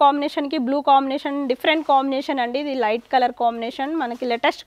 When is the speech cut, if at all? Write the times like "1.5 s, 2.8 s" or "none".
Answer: none